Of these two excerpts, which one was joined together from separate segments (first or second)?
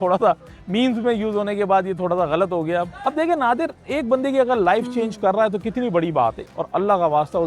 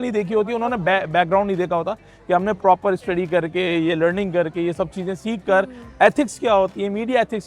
first